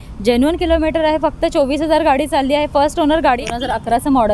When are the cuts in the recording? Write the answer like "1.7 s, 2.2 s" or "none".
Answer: 3.4 s